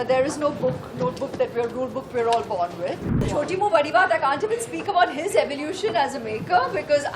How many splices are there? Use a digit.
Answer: 1